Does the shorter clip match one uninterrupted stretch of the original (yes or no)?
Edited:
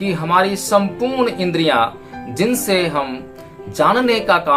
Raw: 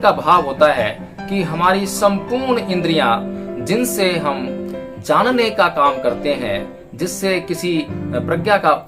yes